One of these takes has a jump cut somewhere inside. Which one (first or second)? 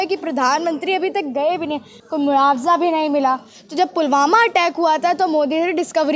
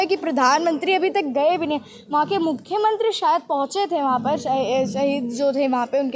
first